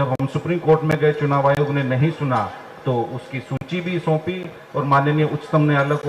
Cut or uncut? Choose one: uncut